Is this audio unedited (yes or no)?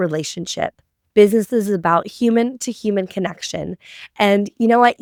yes